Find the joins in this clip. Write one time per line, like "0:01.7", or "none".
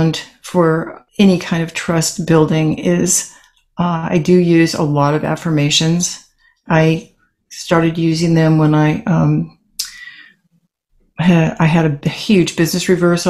0:01.0